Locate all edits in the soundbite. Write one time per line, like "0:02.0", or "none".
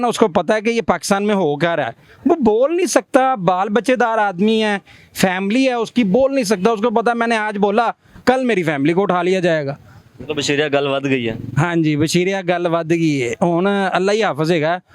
none